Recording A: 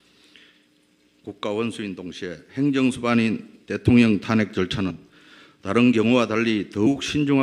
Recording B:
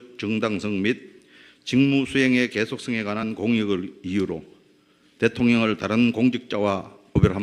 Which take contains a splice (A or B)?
A